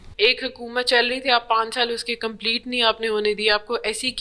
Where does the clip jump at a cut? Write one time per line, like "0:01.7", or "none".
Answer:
none